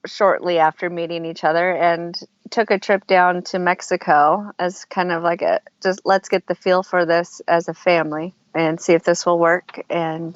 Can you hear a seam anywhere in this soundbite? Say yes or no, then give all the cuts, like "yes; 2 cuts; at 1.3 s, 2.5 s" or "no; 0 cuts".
no; 0 cuts